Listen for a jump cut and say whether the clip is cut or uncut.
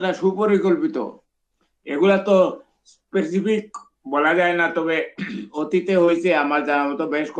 cut